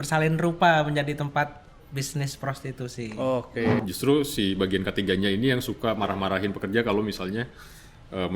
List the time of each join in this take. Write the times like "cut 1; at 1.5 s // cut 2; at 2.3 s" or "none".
cut 1; at 3.8 s